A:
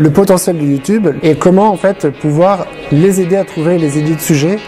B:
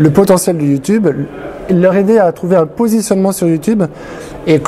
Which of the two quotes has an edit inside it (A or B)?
A